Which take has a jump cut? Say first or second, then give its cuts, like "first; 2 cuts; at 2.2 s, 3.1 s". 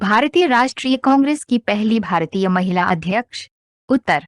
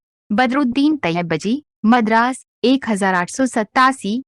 first; 1 cut; at 1.4 s